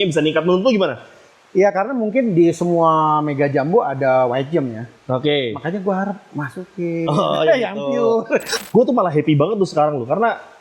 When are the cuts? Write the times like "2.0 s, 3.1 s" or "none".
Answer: 8.5 s